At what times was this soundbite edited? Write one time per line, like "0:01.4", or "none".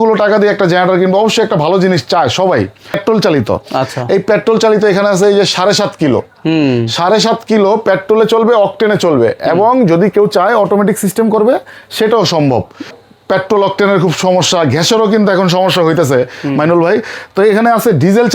0:03.0
0:13.0